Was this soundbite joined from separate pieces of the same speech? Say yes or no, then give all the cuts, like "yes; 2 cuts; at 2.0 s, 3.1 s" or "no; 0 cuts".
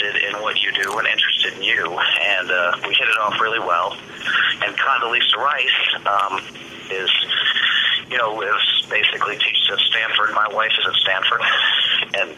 no; 0 cuts